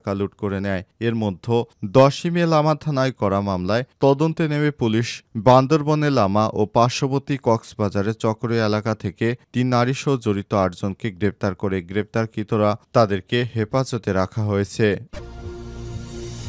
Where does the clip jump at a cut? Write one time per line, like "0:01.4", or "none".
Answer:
0:15.1